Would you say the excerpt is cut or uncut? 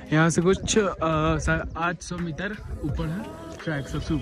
uncut